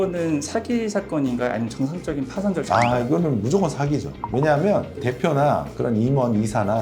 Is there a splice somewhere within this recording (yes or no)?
no